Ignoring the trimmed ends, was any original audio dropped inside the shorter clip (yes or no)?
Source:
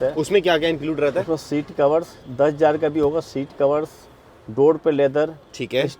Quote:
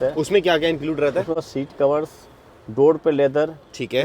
yes